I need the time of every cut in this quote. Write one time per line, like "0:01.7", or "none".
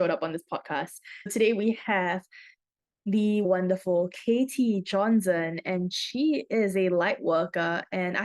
0:01.3
0:03.5